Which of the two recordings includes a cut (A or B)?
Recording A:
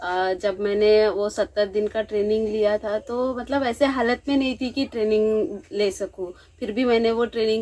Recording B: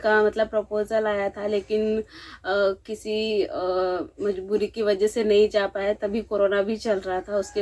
A